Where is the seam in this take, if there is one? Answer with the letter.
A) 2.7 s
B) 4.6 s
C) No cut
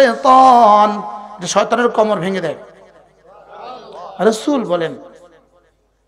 C